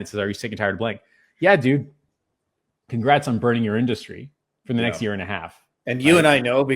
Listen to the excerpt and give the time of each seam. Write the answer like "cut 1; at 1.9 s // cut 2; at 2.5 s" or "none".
none